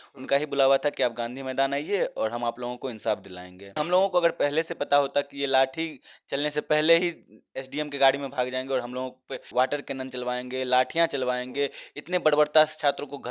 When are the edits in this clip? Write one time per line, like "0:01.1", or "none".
0:03.7
0:09.5